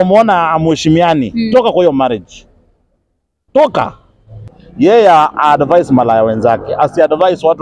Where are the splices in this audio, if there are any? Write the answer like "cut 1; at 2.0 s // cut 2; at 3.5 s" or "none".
cut 1; at 4.6 s